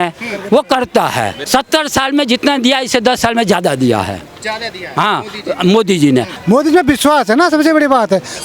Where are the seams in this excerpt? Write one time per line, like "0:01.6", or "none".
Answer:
0:01.4
0:06.3